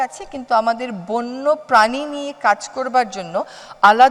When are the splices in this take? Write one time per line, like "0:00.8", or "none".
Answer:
none

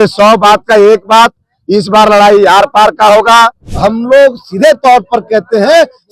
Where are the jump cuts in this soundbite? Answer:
0:03.6

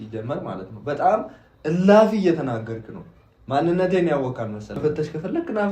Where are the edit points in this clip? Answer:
0:04.8

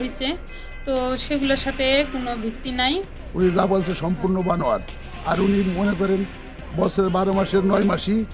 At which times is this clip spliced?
0:03.1

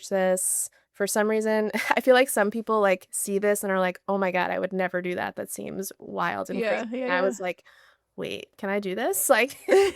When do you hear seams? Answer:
0:08.5

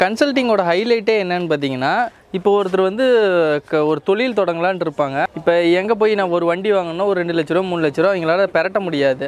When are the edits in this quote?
0:05.3

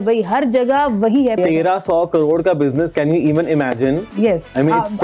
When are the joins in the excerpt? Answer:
0:01.4

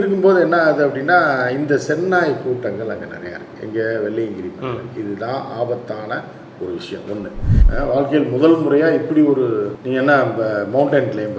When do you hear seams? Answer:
0:07.6

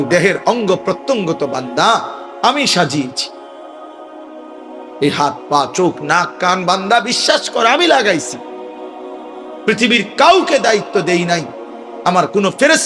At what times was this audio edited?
0:03.1
0:04.9
0:08.2
0:09.7

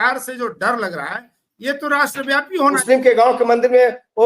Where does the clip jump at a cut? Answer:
0:02.8

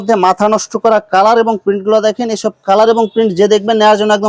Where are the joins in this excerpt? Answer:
none

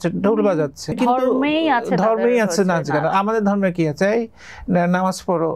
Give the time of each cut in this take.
0:00.9

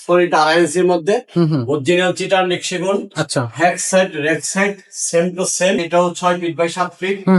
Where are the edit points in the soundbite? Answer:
0:05.8

